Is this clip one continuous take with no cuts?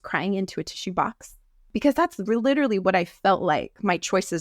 no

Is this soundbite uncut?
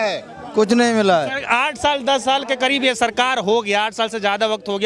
yes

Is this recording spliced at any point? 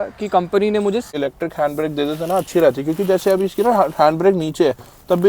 yes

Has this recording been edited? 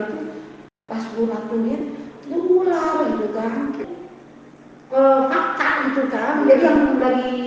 yes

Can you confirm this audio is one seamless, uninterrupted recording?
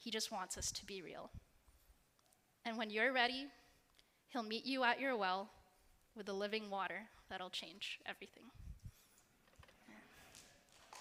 yes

